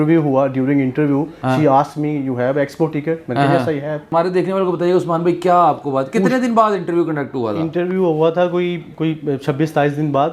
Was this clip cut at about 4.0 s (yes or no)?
yes